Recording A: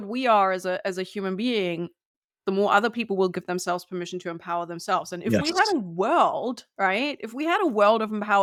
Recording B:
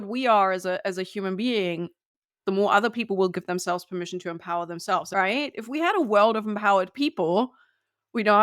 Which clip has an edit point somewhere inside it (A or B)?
B